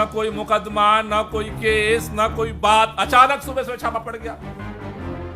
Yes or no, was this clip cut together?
yes